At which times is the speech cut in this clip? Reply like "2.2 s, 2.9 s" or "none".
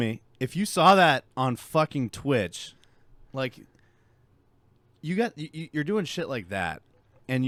none